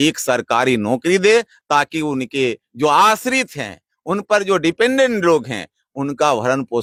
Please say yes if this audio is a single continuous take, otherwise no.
yes